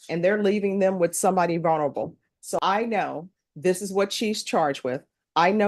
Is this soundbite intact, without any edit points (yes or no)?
no